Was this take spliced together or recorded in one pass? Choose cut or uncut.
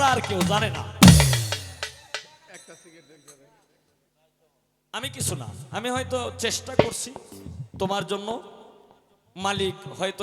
uncut